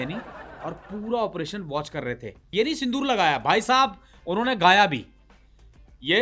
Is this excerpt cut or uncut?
cut